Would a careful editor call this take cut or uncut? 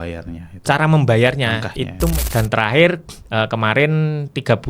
cut